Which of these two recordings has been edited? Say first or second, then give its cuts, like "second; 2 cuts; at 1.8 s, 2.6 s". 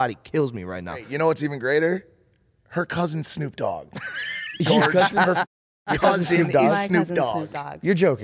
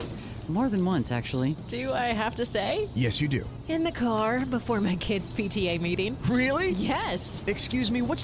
first; 1 cut; at 1.1 s